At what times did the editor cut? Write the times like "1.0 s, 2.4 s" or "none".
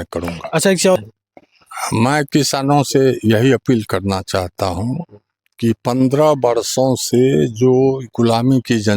1.0 s